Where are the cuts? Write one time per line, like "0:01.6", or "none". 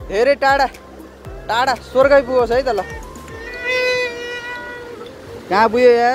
none